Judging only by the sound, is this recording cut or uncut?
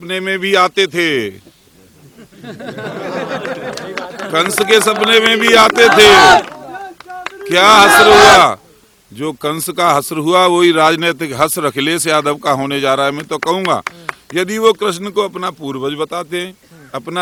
uncut